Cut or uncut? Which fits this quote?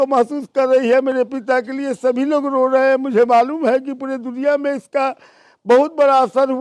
uncut